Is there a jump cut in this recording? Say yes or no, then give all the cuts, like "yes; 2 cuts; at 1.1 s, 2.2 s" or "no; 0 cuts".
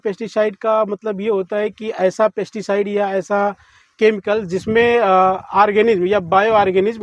no; 0 cuts